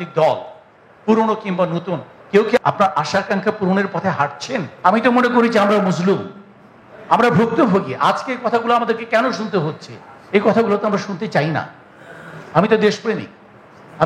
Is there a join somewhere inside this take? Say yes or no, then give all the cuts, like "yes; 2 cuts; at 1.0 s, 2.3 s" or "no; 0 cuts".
yes; 1 cut; at 4.7 s